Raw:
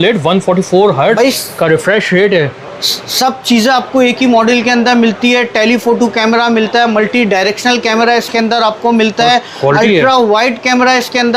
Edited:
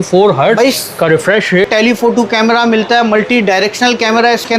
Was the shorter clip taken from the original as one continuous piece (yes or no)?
no